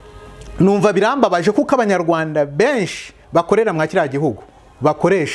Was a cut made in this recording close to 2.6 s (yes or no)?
no